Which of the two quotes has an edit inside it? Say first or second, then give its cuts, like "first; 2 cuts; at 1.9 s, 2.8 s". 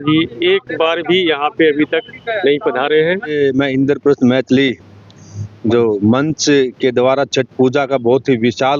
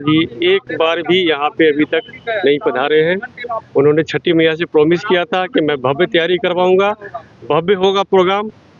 first; 1 cut; at 3.3 s